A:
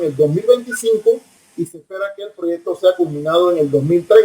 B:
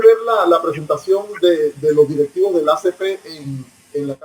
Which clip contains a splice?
A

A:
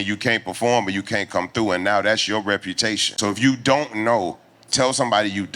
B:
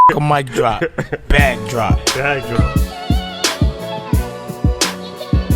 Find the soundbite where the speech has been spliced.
A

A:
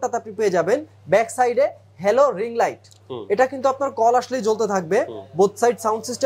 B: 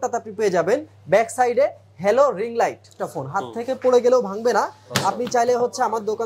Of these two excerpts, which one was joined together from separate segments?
B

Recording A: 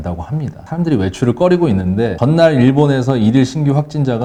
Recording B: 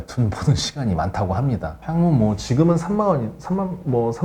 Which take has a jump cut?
B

